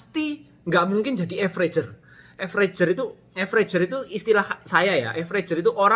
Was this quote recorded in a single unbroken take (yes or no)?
yes